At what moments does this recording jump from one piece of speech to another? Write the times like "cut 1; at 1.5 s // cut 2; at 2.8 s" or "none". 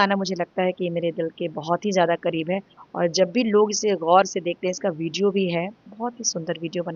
none